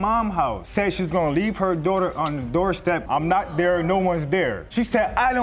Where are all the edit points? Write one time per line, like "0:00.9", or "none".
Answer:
0:03.1